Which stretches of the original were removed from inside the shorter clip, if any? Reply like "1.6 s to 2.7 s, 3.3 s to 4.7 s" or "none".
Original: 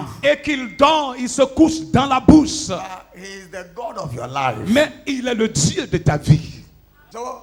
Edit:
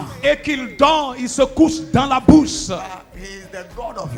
none